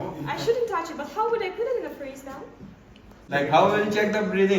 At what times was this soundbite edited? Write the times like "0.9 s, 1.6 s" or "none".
3.2 s